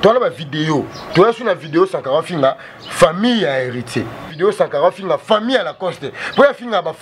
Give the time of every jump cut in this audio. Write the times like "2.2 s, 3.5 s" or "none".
1.0 s, 4.3 s